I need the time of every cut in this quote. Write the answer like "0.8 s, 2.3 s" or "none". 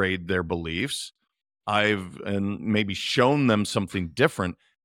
none